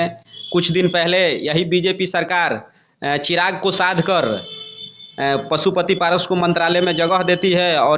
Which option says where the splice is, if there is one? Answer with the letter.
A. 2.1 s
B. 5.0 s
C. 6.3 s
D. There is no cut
D